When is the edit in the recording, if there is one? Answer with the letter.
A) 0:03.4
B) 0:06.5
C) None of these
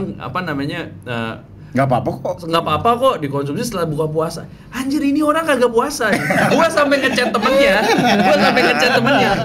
B